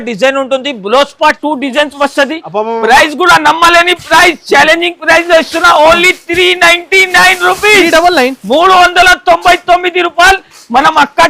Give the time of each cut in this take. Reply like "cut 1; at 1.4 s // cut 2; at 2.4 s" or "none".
cut 1; at 1.4 s